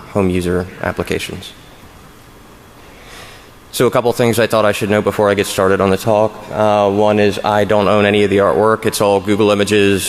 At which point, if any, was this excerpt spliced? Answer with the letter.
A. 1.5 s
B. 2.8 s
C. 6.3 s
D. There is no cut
B